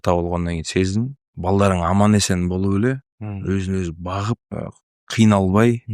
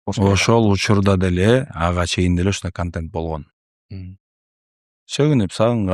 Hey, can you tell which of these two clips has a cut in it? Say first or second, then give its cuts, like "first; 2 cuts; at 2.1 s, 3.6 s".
first; 2 cuts; at 1.2 s, 4.5 s